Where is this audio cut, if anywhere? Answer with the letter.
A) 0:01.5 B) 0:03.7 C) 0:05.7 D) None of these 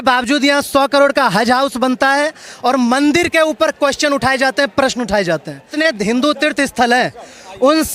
C